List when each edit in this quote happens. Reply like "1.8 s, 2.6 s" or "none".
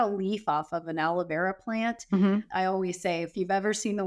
2.5 s